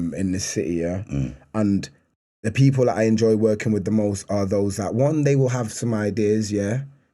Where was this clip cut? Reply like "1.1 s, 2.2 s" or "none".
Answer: none